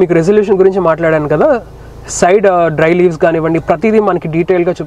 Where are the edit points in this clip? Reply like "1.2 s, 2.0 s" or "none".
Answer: none